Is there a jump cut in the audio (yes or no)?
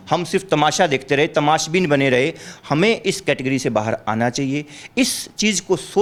no